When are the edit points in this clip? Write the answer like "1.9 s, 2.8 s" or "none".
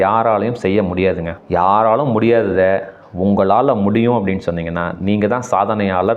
1.3 s